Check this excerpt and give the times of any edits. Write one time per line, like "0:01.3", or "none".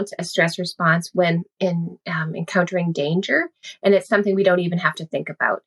0:01.6